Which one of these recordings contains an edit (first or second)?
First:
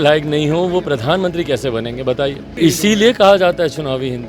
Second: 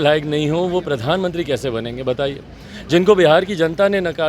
first